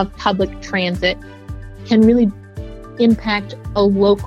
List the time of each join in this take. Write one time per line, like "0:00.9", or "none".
none